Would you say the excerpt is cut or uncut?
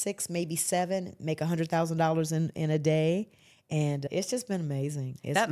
cut